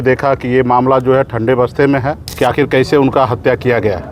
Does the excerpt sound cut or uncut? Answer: cut